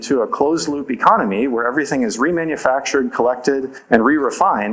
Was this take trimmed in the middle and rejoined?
no; 0 cuts

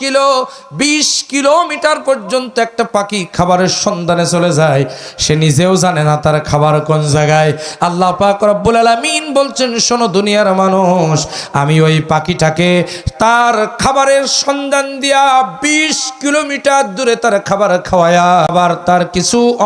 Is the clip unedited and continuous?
no; 1 cut; at 18.5 s

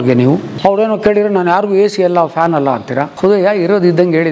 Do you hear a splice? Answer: no; 0 cuts

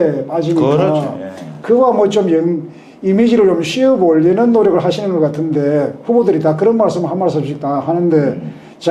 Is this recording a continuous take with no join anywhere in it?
yes; 0 cuts

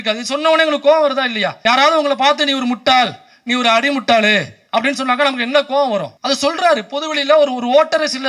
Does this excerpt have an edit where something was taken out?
yes; 2 cuts; at 1.5 s, 6.1 s

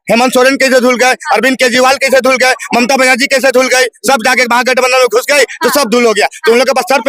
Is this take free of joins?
yes; 0 cuts

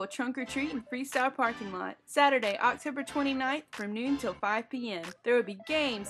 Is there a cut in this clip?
no; 0 cuts

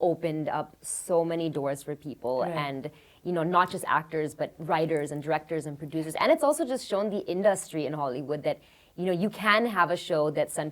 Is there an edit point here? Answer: no; 0 cuts

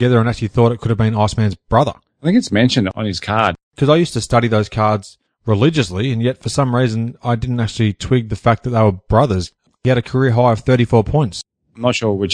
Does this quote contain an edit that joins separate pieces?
yes; 2 cuts; at 9.8 s, 11.4 s

